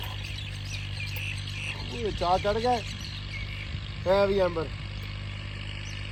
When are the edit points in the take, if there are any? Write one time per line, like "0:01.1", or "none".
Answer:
none